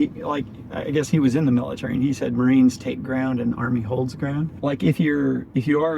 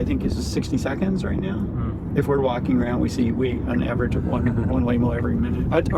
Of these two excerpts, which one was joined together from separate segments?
first; 1 cut; at 4.5 s

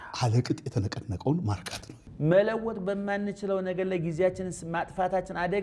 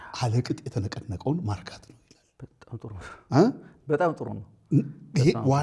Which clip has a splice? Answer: first; 1 cut; at 2.0 s

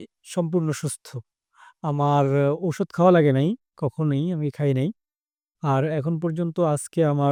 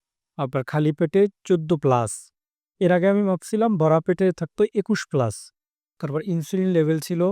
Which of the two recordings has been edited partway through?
second; 1 cut; at 6.0 s

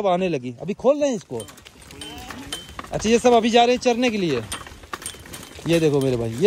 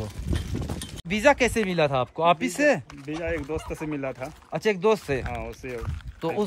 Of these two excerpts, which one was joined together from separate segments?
second; 1 cut; at 1.1 s

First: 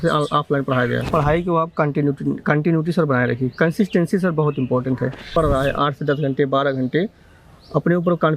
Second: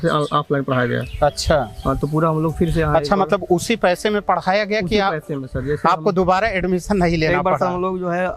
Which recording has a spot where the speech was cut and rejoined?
first; 2 cuts; at 1.0 s, 5.3 s

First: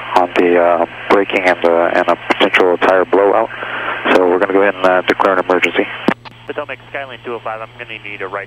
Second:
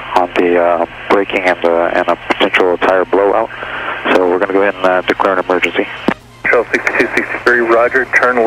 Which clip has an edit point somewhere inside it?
first; 1 cut; at 6.3 s

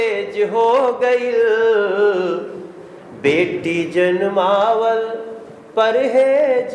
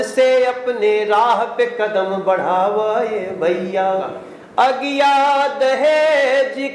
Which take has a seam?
second; 1 cut; at 4.1 s

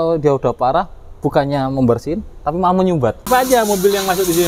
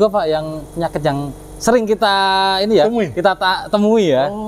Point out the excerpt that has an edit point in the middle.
first; 1 cut; at 3.2 s

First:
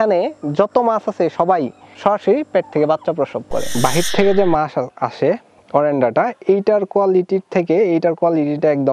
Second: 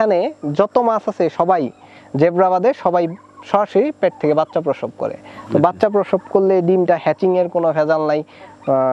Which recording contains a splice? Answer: first; 2 cuts; at 1.8 s, 3.7 s

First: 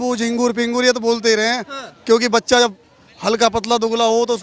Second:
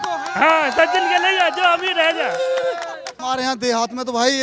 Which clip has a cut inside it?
second; 1 cut; at 3.1 s

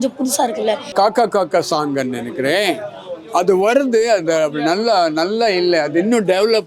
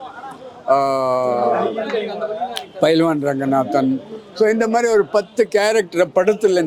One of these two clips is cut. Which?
first; 1 cut; at 0.9 s

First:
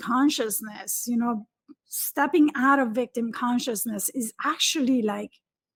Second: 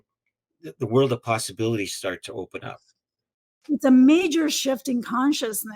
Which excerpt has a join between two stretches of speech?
second; 1 cut; at 3.3 s

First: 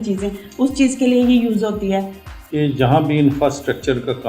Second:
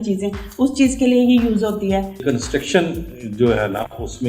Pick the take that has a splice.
second; 1 cut; at 2.2 s

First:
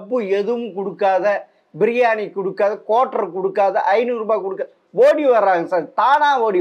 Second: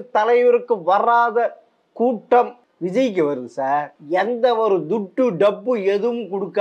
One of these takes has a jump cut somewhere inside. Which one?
second; 2 cuts; at 2.6 s, 4.0 s

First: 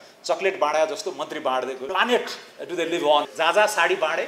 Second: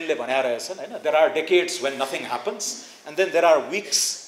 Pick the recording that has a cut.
first; 2 cuts; at 1.8 s, 3.3 s

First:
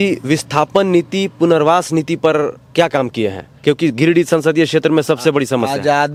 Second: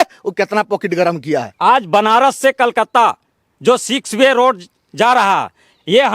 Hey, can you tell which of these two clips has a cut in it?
second; 1 cut; at 1.5 s

